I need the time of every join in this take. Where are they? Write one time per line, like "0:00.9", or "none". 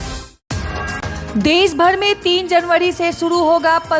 0:01.1